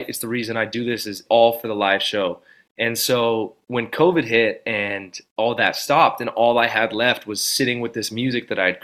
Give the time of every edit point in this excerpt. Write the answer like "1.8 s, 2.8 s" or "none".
1.2 s